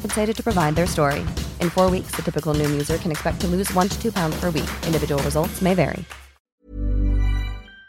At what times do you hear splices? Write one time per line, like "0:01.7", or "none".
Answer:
0:06.5